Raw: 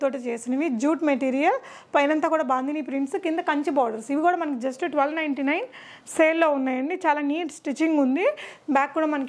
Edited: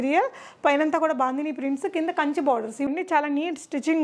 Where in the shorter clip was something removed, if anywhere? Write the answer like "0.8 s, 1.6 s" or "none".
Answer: 2.9 s